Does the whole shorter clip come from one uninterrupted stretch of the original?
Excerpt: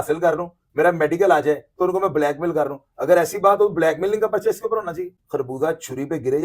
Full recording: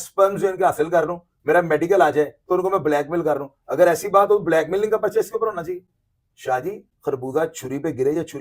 no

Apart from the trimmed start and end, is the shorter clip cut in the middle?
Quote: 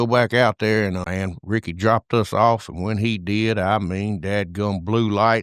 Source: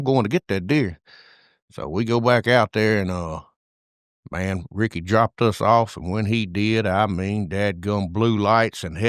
yes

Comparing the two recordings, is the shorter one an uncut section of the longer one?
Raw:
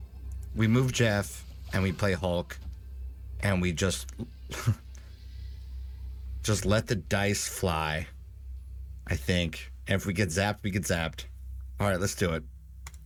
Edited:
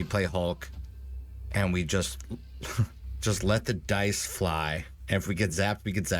no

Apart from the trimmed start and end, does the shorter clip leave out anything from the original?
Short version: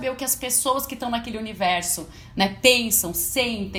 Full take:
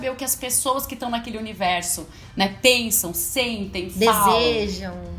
no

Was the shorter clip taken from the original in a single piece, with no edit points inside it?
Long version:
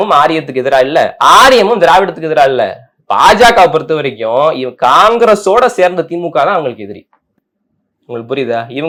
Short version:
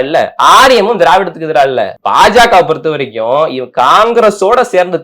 no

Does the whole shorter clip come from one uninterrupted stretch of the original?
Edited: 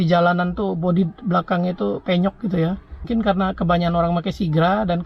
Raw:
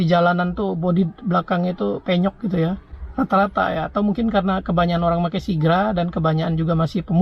no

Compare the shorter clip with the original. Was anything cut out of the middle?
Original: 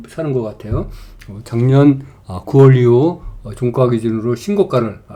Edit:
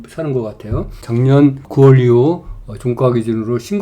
yes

